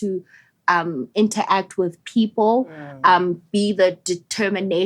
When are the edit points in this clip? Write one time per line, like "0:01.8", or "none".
none